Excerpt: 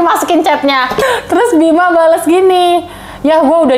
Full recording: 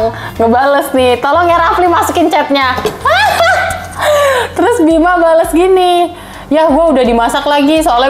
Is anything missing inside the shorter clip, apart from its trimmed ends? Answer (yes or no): yes